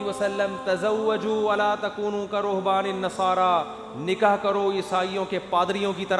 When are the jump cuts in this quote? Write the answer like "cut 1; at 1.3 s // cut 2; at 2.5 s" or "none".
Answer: none

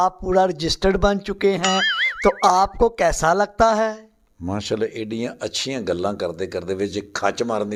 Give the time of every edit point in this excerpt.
none

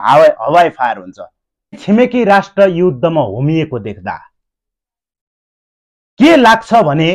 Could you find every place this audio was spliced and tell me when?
cut 1; at 1.8 s

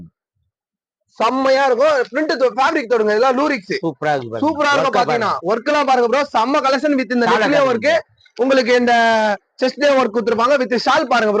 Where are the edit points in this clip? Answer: none

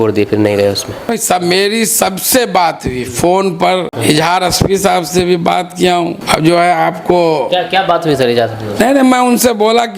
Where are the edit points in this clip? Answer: cut 1; at 1.2 s // cut 2; at 3.9 s // cut 3; at 6.2 s

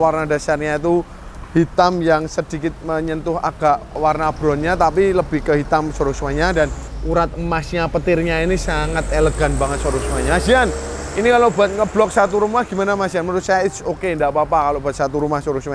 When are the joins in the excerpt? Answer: cut 1; at 4.0 s // cut 2; at 6.9 s

